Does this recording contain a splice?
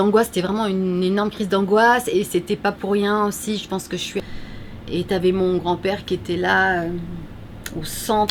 yes; 1 cut; at 4.2 s

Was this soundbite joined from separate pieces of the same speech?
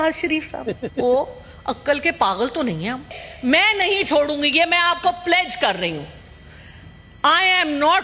yes; 1 cut; at 3.2 s

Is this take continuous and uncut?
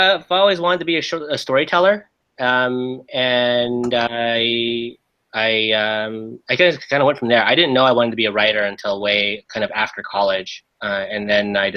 no; 1 cut; at 1.5 s

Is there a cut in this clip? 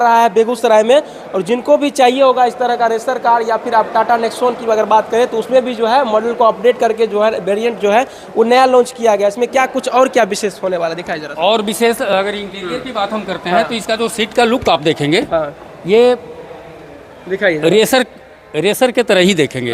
no; 0 cuts

